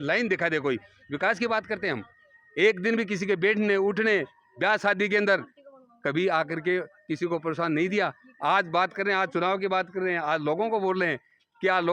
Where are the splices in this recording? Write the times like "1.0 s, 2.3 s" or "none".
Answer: none